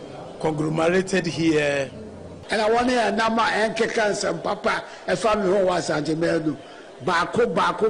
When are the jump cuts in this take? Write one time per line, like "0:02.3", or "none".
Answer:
0:02.3